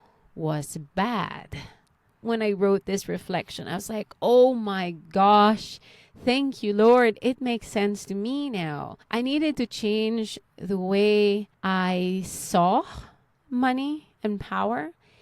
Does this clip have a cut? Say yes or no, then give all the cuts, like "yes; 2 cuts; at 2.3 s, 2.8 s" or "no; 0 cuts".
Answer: yes; 3 cuts; at 2.2 s, 8.9 s, 11.5 s